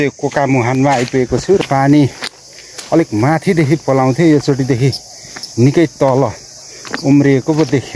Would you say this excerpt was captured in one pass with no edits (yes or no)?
no